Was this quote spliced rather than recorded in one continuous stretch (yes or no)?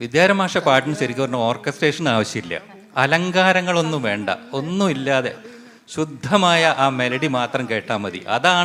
no